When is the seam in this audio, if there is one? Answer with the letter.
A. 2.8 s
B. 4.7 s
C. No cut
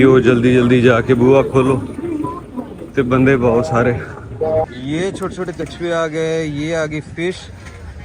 B